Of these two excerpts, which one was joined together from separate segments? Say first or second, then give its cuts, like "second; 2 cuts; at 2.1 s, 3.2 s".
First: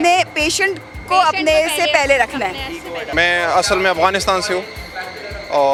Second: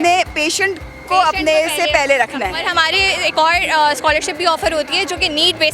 second; 1 cut; at 2.6 s